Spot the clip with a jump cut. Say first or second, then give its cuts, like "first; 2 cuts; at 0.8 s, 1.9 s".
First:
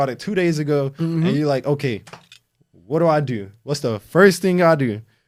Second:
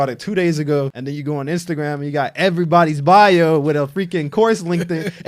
second; 1 cut; at 0.9 s